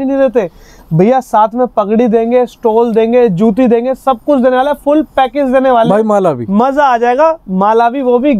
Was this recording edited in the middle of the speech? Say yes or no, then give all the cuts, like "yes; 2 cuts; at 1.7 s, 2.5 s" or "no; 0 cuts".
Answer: no; 0 cuts